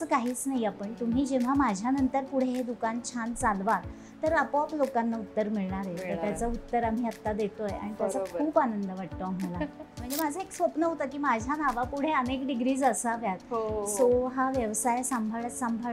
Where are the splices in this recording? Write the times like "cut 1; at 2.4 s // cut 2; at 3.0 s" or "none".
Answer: cut 1; at 10.1 s